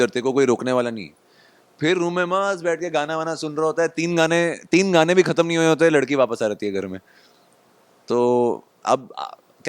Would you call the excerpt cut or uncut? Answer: uncut